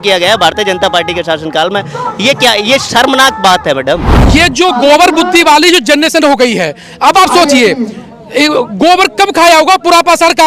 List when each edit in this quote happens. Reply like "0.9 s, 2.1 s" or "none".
4.1 s